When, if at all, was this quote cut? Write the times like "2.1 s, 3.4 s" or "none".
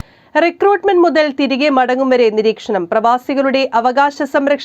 none